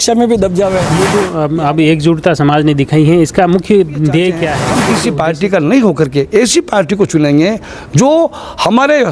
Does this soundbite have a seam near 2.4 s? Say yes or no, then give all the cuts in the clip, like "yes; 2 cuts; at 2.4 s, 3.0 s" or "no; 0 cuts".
no; 2 cuts; at 0.9 s, 4.8 s